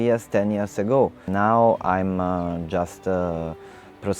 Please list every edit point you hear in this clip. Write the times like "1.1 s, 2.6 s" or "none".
1.2 s